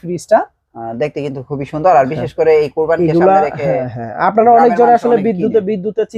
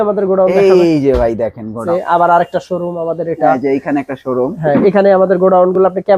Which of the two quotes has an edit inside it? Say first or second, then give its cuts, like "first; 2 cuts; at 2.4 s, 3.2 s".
second; 1 cut; at 1.8 s